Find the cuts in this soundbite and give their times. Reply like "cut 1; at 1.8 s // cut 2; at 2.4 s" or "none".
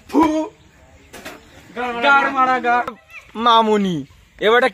cut 1; at 3.0 s